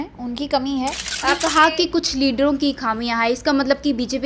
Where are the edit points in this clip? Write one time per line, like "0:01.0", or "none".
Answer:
0:01.1